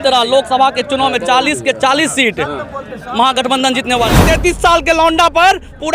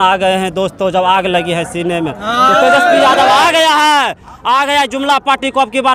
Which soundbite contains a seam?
first; 1 cut; at 4.1 s

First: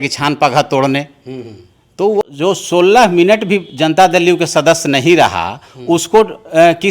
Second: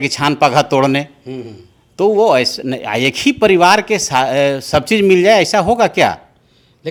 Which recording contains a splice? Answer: first; 1 cut; at 2.2 s

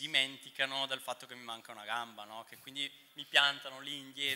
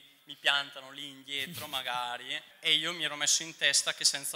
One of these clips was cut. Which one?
second; 1 cut; at 2.5 s

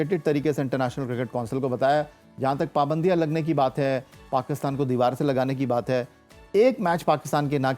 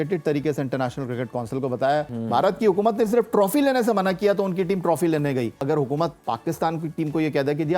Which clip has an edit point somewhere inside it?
second; 2 cuts; at 2.1 s, 5.6 s

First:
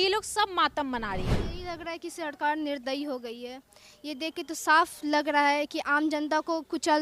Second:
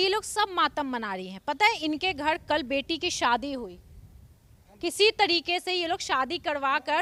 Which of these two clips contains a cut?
first; 1 cut; at 1.4 s

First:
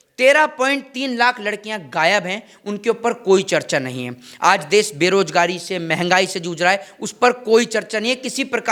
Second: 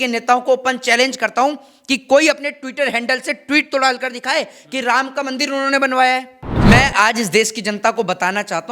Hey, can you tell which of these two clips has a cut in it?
second; 1 cut; at 6.5 s

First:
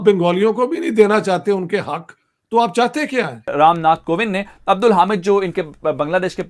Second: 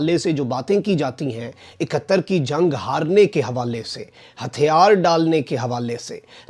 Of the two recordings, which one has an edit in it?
first; 1 cut; at 3.5 s

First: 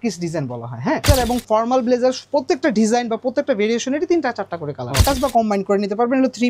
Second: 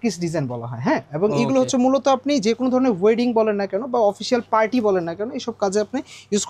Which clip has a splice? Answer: first; 2 cuts; at 1.1 s, 5.0 s

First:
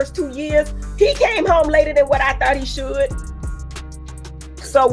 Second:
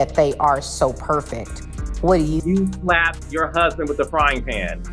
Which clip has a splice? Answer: second; 1 cut; at 2.3 s

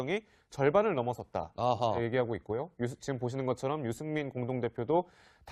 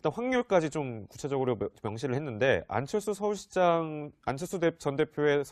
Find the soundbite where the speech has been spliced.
second; 1 cut; at 2.0 s

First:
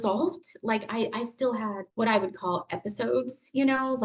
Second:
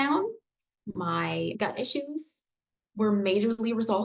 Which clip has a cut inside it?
first; 1 cut; at 1.8 s

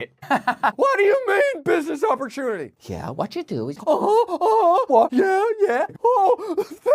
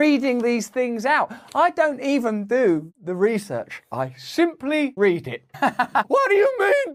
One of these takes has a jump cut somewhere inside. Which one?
first; 3 cuts; at 3.8 s, 4.9 s, 5.9 s

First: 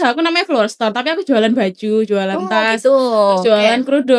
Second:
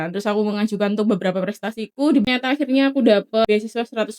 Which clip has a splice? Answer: second; 2 cuts; at 2.2 s, 3.5 s

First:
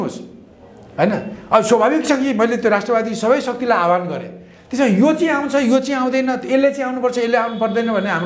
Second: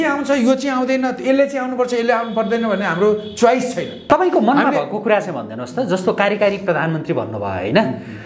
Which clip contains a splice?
second; 1 cut; at 4.0 s

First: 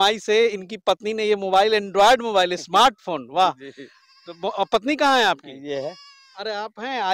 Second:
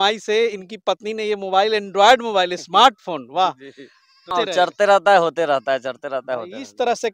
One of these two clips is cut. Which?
second; 1 cut; at 4.3 s

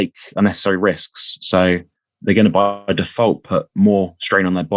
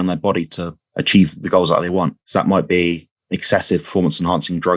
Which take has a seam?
second; 1 cut; at 2.2 s

